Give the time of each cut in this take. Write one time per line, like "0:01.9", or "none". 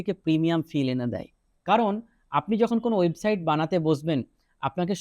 0:01.5